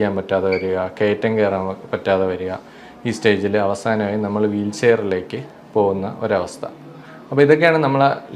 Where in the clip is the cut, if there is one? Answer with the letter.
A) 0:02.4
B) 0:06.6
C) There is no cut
C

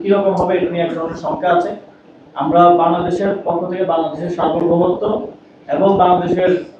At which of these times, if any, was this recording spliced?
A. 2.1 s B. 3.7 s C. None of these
C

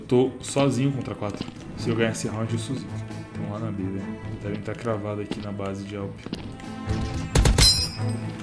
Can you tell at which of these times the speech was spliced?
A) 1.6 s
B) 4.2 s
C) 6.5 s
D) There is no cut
A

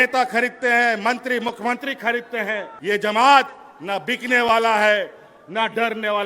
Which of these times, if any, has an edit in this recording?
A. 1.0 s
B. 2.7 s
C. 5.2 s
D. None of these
B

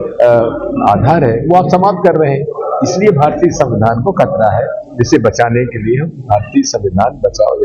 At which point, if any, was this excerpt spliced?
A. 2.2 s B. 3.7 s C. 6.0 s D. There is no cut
D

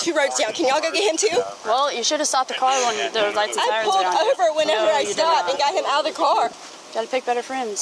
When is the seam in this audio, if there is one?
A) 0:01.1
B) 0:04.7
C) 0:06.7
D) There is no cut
C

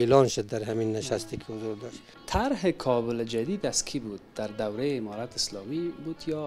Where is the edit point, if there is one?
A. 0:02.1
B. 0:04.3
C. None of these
A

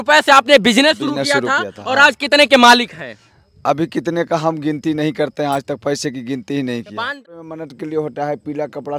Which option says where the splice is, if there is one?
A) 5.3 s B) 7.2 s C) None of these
B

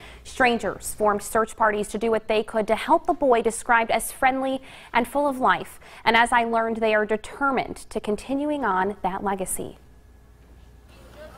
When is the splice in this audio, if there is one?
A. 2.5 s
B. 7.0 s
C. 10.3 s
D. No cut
D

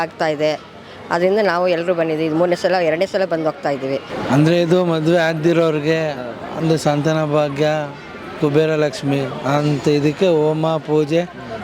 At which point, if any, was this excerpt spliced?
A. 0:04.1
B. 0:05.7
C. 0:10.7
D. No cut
A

